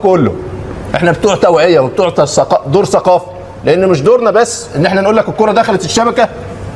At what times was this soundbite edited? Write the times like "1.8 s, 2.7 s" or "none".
none